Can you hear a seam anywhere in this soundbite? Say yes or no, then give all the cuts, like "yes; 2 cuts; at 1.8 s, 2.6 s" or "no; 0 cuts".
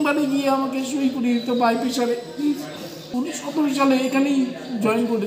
yes; 1 cut; at 2.9 s